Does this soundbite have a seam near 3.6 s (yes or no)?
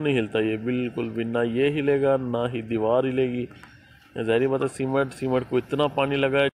no